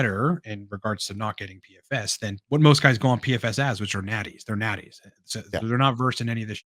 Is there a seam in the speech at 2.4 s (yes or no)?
yes